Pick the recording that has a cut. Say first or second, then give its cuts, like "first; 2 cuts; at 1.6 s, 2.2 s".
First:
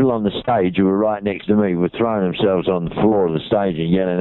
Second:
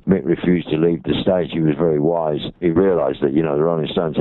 second; 1 cut; at 2.6 s